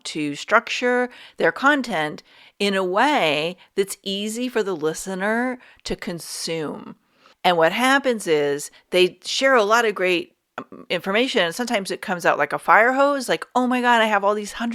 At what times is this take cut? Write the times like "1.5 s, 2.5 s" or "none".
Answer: none